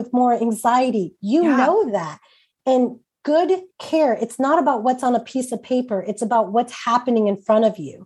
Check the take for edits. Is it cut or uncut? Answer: uncut